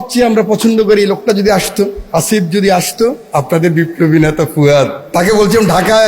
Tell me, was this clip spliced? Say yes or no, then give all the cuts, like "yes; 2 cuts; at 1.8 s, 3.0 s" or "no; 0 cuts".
yes; 3 cuts; at 2.0 s, 3.2 s, 5.0 s